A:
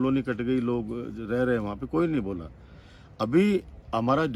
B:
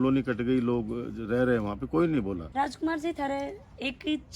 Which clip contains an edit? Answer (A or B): B